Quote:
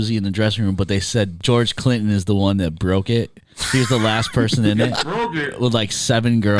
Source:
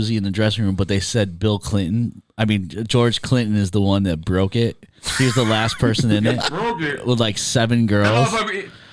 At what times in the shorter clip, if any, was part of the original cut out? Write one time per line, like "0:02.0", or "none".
0:01.3